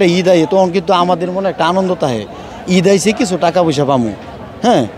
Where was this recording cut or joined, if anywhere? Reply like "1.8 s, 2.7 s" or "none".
none

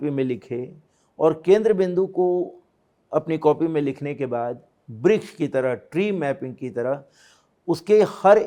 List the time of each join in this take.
none

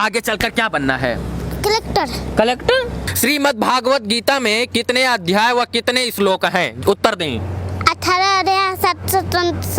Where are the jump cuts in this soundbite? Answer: 3.0 s

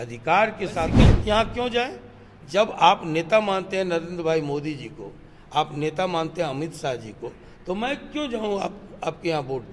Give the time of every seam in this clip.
0.9 s

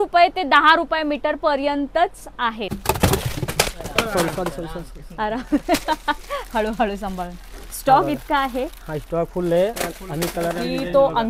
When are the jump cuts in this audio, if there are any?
2.7 s

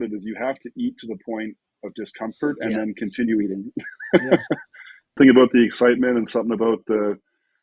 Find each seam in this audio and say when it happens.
5.2 s

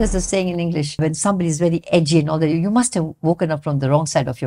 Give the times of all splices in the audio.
1.0 s

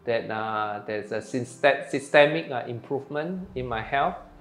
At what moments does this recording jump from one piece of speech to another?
none

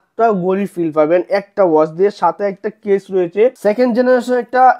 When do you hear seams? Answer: 3.6 s

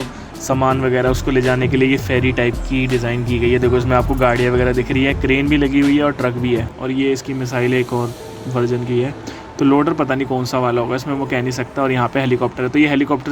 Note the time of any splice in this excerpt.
6.7 s

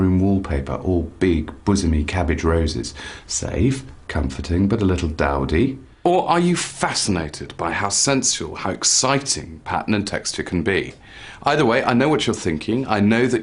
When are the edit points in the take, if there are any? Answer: none

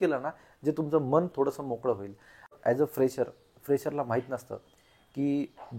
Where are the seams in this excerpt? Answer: 2.5 s

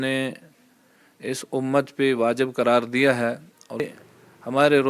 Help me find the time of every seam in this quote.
3.9 s

